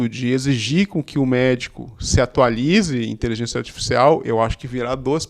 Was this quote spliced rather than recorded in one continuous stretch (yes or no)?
no